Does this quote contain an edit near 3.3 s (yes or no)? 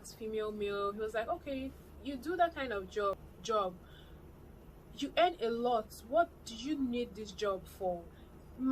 yes